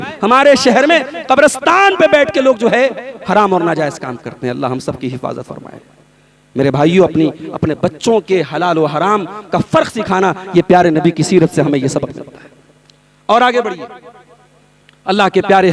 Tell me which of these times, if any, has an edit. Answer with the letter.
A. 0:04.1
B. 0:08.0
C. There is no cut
C